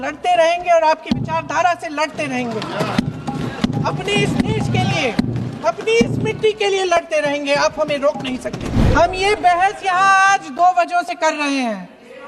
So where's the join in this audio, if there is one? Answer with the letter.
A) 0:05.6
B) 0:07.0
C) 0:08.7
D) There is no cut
C